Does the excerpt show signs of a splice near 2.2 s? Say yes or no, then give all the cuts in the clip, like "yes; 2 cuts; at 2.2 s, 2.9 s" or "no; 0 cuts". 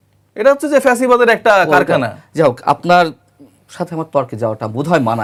no; 0 cuts